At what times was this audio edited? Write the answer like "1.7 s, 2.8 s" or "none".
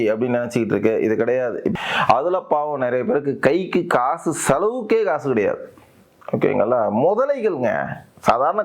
1.7 s

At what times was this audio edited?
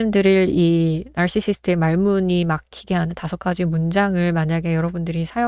none

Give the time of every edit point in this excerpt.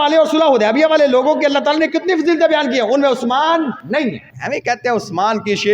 3.9 s

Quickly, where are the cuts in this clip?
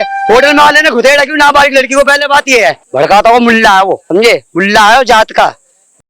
2.8 s, 4.0 s

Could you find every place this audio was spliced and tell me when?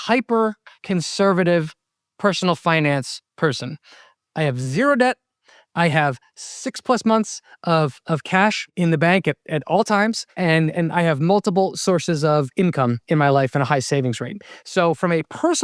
10.4 s

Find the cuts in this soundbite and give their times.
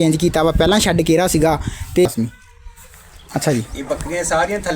2.1 s

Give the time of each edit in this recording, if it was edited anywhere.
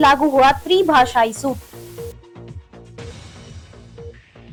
none

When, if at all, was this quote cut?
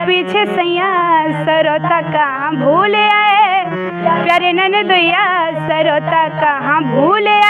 none

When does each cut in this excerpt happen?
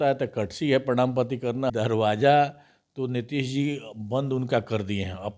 1.7 s

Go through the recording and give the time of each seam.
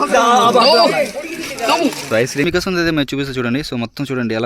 2.4 s

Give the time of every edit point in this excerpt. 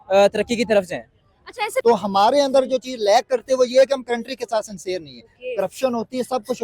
1.8 s

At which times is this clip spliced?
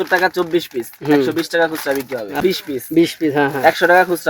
2.4 s

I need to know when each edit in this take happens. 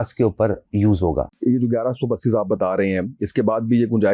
1.3 s

